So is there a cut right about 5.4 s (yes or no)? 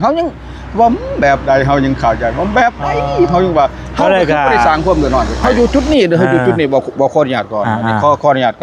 yes